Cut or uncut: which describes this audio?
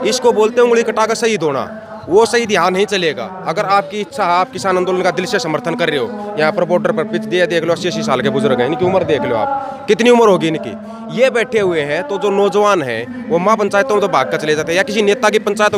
uncut